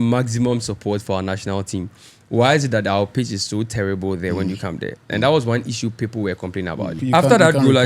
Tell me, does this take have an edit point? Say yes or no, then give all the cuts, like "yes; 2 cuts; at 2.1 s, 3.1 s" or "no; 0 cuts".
yes; 1 cut; at 7.0 s